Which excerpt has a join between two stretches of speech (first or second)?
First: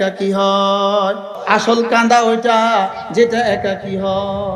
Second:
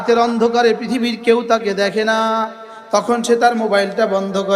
first